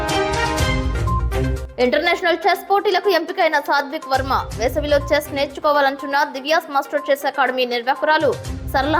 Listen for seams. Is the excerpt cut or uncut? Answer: cut